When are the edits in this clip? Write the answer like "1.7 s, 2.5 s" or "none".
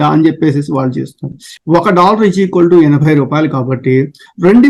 1.5 s